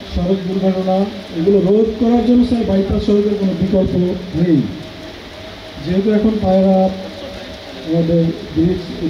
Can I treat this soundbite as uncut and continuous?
yes; 0 cuts

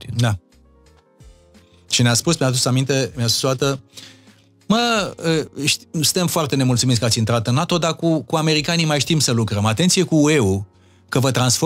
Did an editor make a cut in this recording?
no; 0 cuts

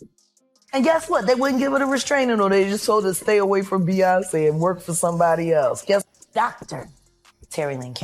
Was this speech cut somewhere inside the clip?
yes; 1 cut; at 6.1 s

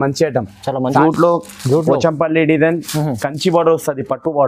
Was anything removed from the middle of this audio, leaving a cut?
yes; 1 cut; at 1.0 s

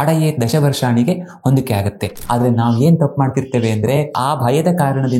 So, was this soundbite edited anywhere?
yes; 2 cuts; at 2.1 s, 4.1 s

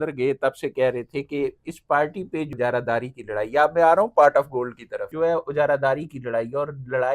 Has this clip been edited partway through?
yes; 2 cuts; at 2.5 s, 5.1 s

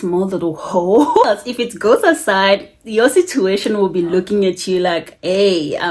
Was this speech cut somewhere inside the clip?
yes; 1 cut; at 1.3 s

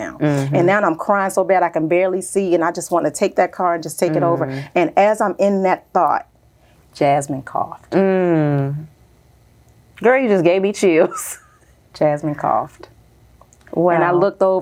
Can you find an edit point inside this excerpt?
no; 0 cuts

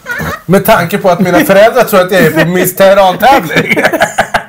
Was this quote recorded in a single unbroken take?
yes; 0 cuts

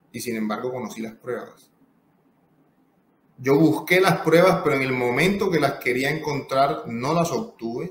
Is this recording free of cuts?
yes; 0 cuts

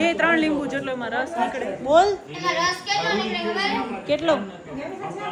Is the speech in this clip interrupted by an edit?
no; 0 cuts

